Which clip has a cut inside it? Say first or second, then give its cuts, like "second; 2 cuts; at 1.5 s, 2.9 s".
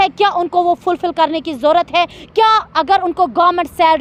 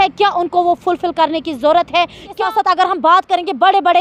second; 1 cut; at 2.3 s